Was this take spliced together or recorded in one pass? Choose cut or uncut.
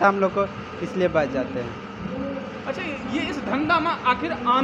uncut